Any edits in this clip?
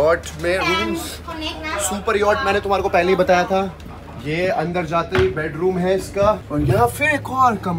yes; 1 cut; at 6.5 s

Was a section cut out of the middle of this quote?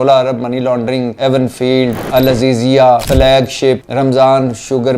yes; 4 cuts; at 1.1 s, 2.0 s, 3.1 s, 3.9 s

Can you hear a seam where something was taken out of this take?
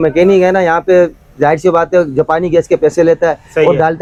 no; 0 cuts

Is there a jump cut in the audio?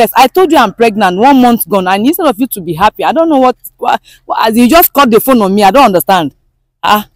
no; 0 cuts

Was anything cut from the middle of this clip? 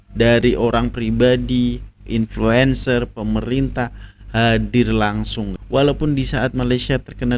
yes; 1 cut; at 5.6 s

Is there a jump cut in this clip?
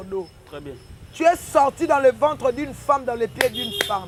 no; 0 cuts

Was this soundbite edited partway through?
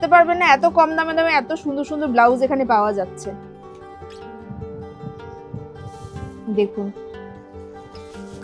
no; 0 cuts

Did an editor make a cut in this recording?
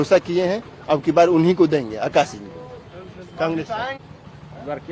no; 0 cuts

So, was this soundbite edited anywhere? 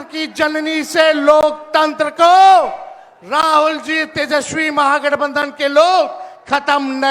no; 0 cuts

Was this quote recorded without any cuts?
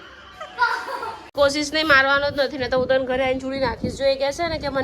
no; 1 cut; at 1.3 s

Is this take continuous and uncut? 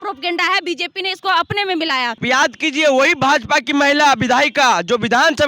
no; 1 cut; at 2.2 s

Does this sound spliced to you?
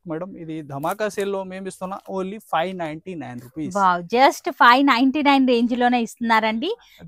no; 0 cuts

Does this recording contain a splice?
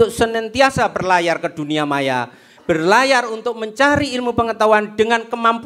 no; 0 cuts

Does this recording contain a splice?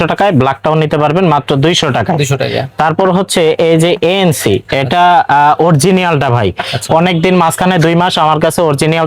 no; 0 cuts

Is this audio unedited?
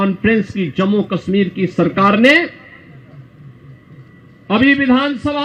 yes; 0 cuts

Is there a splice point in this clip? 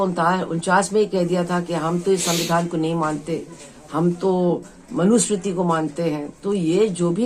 no; 0 cuts

